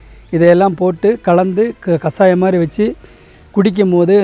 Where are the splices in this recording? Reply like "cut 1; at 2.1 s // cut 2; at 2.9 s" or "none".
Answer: none